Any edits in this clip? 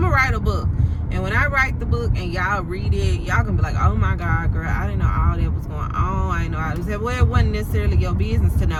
no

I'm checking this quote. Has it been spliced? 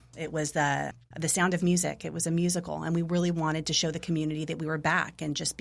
no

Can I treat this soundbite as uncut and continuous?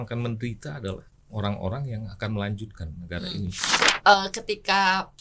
no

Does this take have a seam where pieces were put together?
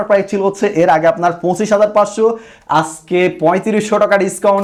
no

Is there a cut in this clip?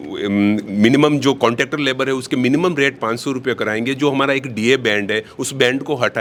no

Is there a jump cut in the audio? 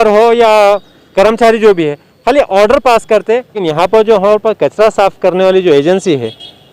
yes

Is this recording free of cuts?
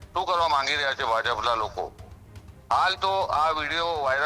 yes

